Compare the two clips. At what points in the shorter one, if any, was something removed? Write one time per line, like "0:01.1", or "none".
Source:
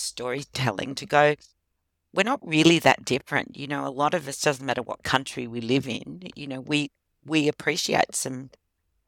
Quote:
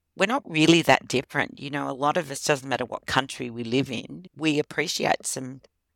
0:04.2